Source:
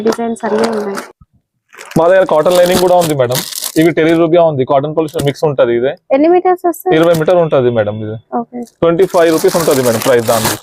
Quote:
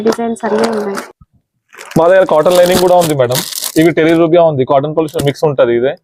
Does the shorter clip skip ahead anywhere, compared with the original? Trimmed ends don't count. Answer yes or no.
no